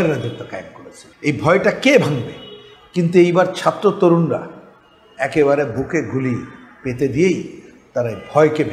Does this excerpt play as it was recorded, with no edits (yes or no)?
yes